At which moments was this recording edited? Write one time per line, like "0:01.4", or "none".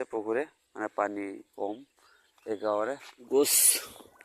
0:03.1